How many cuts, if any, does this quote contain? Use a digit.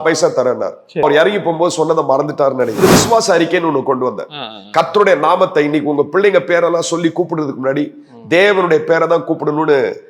2